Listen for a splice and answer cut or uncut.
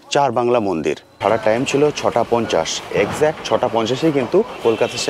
cut